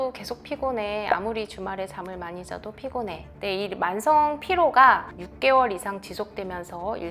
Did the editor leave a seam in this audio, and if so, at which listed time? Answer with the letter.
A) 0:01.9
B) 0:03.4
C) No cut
B